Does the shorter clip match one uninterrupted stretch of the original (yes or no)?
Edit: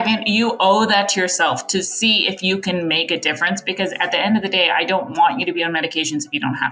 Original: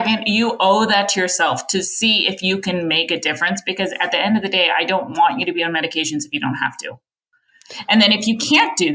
yes